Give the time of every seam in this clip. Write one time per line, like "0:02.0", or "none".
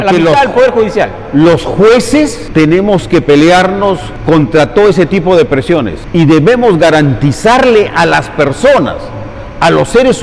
0:02.4
0:04.1
0:06.0